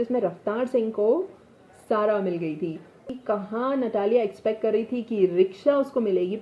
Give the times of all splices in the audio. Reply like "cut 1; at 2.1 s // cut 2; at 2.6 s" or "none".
cut 1; at 3.0 s